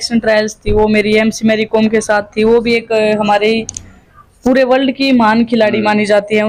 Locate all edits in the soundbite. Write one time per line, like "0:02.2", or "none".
none